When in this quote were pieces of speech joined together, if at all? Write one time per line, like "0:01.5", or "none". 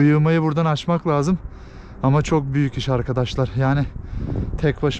none